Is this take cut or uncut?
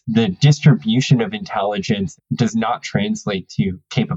uncut